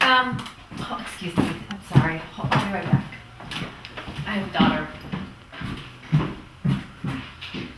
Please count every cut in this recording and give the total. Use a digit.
0